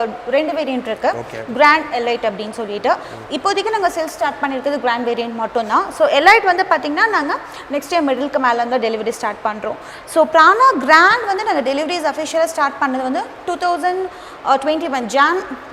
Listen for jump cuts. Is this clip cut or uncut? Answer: uncut